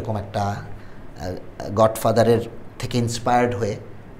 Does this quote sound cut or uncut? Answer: uncut